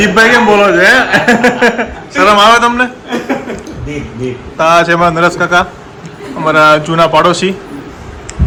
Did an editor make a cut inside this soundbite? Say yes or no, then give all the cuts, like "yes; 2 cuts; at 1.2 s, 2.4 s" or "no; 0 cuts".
no; 0 cuts